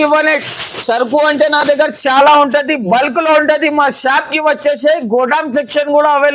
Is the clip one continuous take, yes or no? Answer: yes